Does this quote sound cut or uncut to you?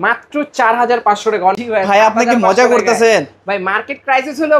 cut